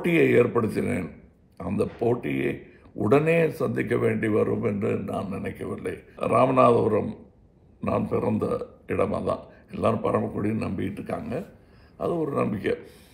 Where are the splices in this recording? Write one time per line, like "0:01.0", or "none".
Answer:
0:06.2

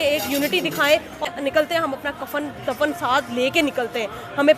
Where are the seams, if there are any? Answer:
0:01.3

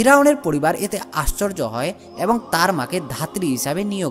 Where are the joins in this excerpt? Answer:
none

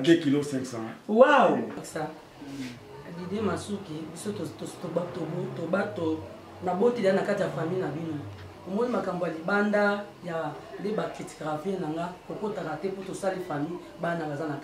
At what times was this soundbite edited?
0:01.9

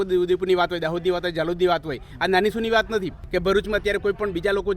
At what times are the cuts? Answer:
0:03.2

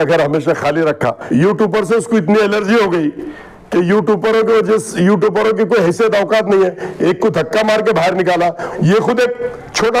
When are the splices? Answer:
0:01.2
0:08.7

